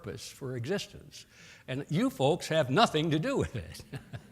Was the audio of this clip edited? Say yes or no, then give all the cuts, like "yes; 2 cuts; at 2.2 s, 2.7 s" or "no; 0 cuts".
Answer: yes; 1 cut; at 1.8 s